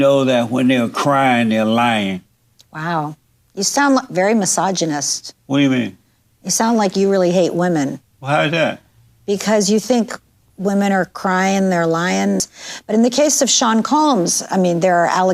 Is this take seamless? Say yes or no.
no